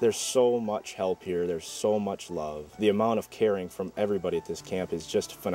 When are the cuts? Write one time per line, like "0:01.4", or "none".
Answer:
0:02.8